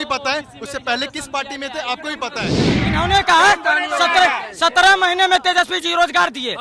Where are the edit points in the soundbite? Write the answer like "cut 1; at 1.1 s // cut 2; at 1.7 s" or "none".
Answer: cut 1; at 2.8 s